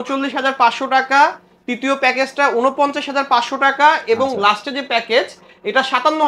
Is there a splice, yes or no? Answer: no